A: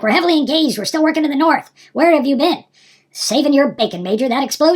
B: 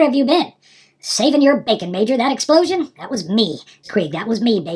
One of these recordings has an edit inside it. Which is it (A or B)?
B